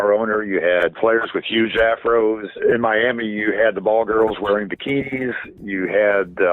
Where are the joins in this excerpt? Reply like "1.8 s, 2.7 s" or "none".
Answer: 1.0 s, 2.5 s